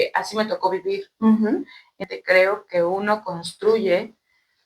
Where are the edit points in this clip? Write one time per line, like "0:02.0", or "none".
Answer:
0:02.0